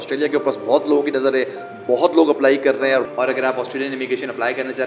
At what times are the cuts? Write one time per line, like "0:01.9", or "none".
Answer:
0:03.1